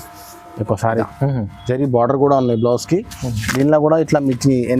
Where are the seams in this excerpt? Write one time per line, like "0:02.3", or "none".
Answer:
0:01.1